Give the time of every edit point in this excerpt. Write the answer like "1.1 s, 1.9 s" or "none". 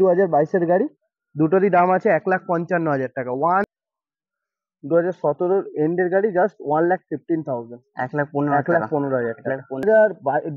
3.6 s, 9.8 s

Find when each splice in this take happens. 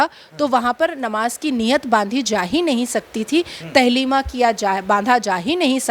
none

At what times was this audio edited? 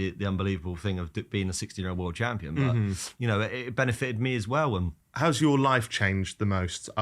5.0 s

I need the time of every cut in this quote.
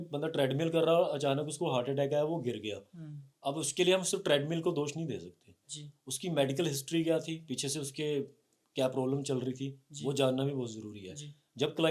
none

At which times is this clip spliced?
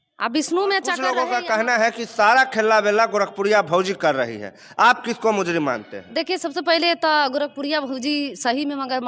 1.1 s

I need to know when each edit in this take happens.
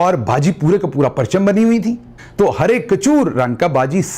2.2 s

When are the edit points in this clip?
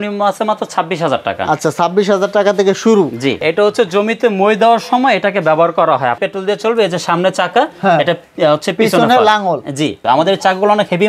3.4 s, 6.2 s, 10.0 s

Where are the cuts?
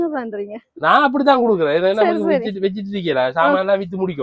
none

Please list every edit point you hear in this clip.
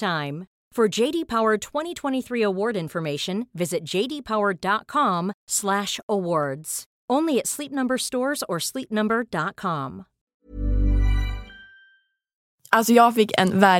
12.5 s

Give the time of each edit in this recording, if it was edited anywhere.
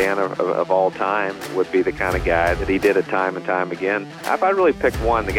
1.5 s, 2.6 s, 4.2 s

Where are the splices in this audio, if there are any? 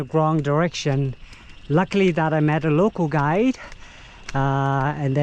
none

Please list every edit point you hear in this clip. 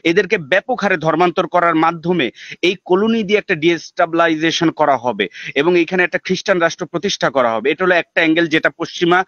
none

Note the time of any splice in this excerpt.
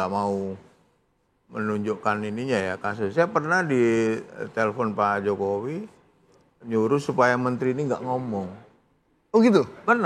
none

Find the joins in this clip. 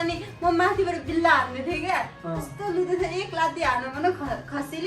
none

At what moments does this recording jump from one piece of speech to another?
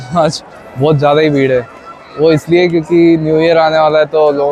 none

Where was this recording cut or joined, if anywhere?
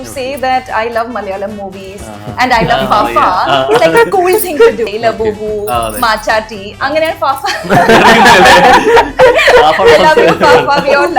4.9 s

